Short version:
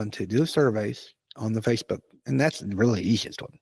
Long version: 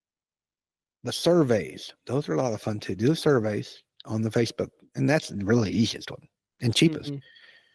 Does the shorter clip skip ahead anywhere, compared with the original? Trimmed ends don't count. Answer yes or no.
no